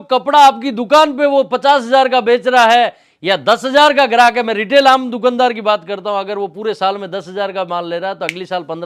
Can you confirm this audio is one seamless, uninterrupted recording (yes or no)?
yes